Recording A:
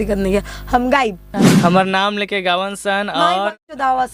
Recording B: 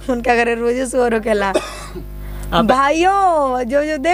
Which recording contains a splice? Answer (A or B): A